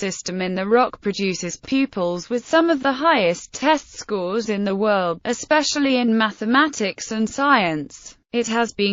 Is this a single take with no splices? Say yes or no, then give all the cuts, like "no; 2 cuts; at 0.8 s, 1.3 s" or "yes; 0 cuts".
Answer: yes; 0 cuts